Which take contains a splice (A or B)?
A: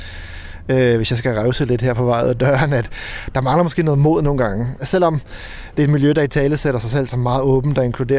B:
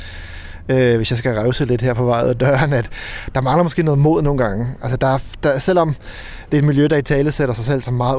A